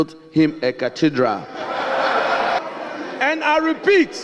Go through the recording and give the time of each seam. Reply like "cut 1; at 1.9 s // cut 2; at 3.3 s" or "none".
cut 1; at 2.6 s